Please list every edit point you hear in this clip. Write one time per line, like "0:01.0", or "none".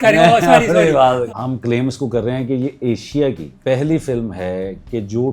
0:01.2
0:03.5